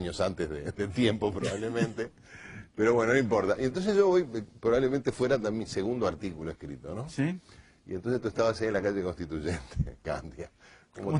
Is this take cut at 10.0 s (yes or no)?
no